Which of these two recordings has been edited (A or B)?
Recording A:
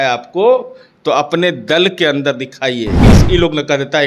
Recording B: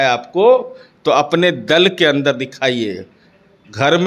A